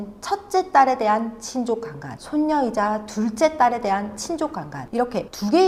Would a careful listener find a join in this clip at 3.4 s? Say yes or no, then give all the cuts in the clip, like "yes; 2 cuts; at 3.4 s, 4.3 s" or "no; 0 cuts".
no; 0 cuts